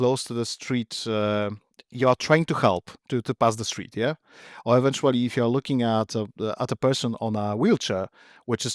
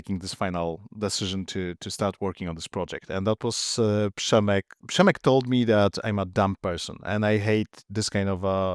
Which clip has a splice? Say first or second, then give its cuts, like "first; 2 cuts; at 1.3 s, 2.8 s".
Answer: second; 1 cut; at 4.8 s